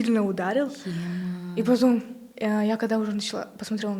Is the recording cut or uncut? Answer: uncut